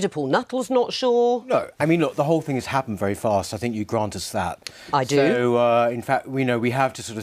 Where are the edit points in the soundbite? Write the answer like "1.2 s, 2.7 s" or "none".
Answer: 4.2 s